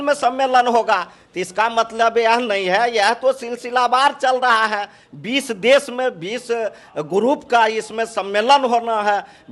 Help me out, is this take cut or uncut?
uncut